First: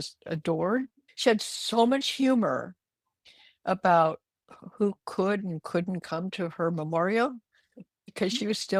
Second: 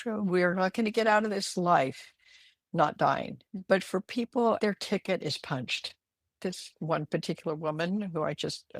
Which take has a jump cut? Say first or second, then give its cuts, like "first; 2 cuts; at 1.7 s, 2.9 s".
second; 3 cuts; at 3.4 s, 4.6 s, 6.4 s